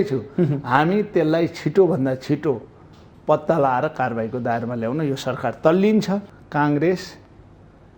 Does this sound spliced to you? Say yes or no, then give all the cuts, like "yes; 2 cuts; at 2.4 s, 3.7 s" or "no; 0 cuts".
yes; 1 cut; at 6.3 s